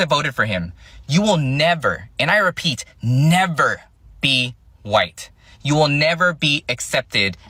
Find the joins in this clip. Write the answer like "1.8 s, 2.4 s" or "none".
none